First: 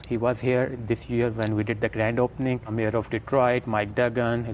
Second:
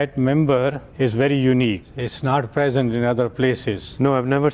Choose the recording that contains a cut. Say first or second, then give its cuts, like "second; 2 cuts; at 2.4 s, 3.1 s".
second; 1 cut; at 1.8 s